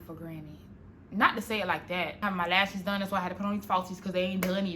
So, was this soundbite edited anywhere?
yes; 1 cut; at 2.2 s

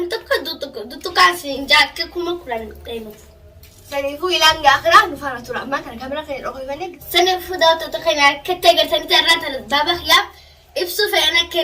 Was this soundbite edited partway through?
yes; 1 cut; at 6.9 s

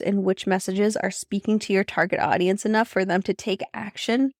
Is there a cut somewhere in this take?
no; 0 cuts

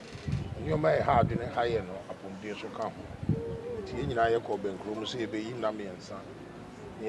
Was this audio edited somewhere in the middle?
no; 0 cuts

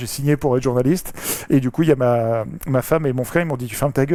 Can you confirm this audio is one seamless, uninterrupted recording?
yes; 0 cuts

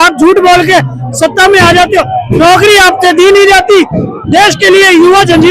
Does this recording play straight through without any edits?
yes; 0 cuts

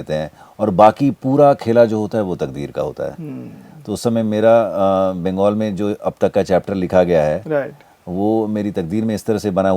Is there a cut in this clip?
no; 0 cuts

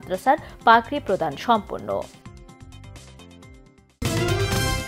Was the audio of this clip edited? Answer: yes; 1 cut; at 4.0 s

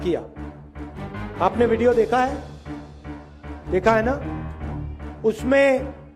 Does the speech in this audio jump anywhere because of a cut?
no; 0 cuts

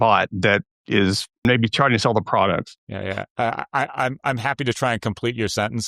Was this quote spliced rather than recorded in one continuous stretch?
yes; 2 cuts; at 1.4 s, 2.8 s

